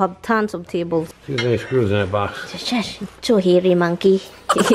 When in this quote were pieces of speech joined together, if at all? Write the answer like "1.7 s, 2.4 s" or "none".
1.2 s